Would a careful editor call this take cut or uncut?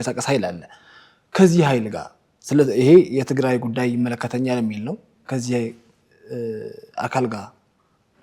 cut